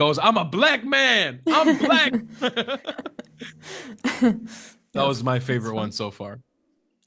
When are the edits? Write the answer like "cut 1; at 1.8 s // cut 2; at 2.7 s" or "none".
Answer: none